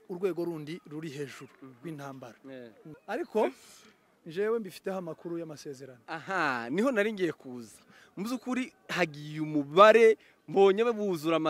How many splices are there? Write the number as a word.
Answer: one